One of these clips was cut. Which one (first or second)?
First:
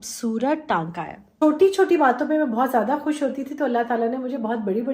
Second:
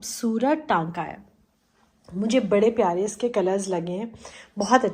first